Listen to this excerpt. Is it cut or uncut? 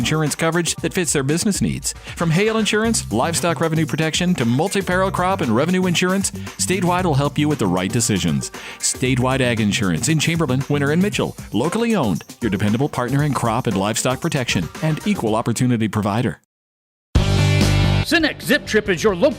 cut